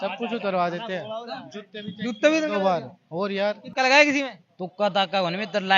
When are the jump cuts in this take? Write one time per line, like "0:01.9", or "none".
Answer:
0:03.6